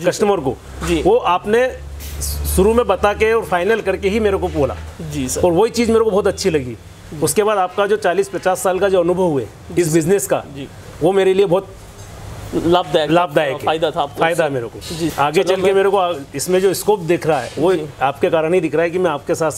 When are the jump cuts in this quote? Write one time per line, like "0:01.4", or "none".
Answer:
0:15.1